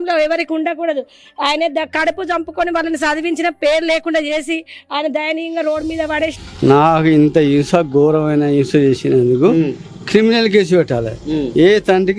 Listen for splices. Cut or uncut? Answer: cut